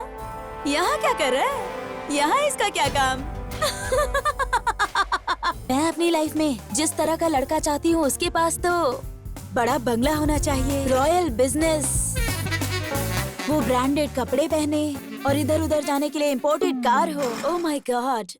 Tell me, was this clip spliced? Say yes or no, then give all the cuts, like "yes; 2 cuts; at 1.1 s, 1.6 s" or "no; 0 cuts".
yes; 4 cuts; at 5.7 s, 10.8 s, 15.1 s, 17.4 s